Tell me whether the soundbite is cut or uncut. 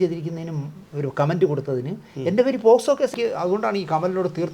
cut